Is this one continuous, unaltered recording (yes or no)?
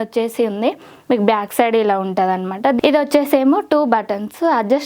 no